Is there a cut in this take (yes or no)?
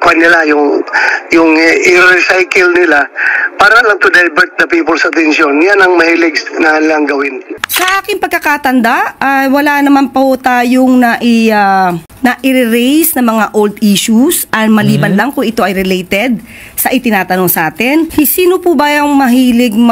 yes